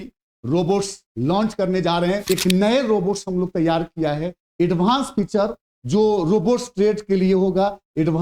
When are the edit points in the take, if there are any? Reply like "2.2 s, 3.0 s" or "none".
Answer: 2.2 s